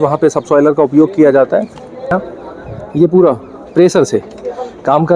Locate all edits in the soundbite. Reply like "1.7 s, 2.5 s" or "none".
2.1 s

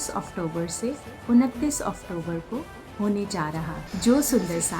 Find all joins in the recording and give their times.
3.8 s

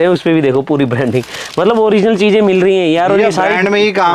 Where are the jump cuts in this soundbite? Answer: none

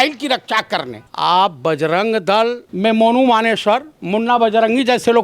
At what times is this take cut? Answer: 1.1 s, 2.7 s

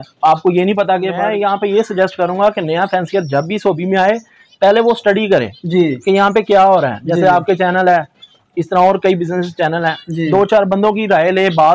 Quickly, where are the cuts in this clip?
1.1 s

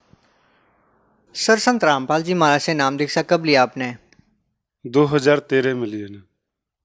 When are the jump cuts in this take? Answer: none

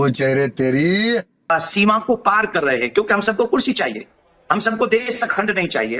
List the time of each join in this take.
none

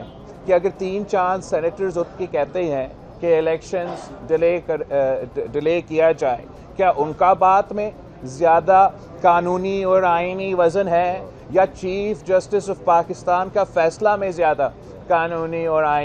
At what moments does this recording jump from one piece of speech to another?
none

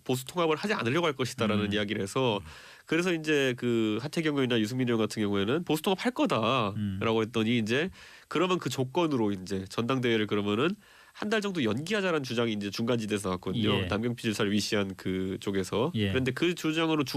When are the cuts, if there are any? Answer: 2.7 s

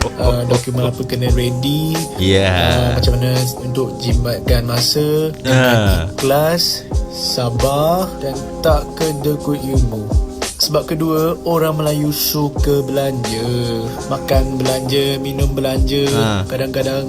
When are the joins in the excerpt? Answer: none

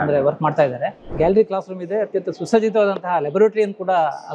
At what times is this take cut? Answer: 1.0 s

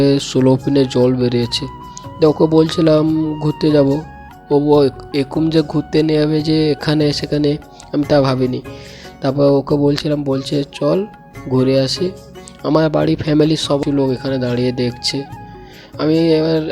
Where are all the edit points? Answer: 13.8 s

